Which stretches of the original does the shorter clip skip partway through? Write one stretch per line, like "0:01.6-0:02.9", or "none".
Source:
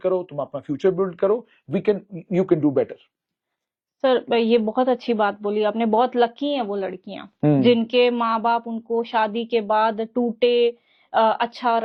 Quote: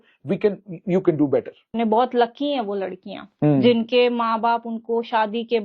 0:03.2-0:05.7